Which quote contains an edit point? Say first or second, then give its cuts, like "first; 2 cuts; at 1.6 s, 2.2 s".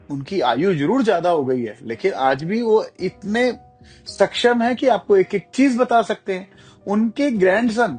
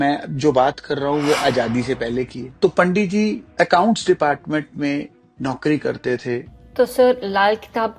second; 3 cuts; at 2.4 s, 3.4 s, 6.6 s